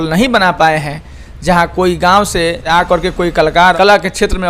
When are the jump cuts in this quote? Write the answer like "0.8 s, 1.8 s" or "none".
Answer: 2.6 s, 3.8 s